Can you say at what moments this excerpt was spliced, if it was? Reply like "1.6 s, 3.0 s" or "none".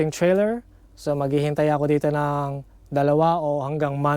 none